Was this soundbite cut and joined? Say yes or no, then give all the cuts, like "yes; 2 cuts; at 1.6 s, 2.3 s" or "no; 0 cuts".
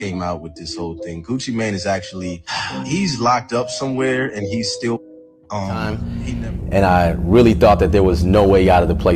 yes; 1 cut; at 5.8 s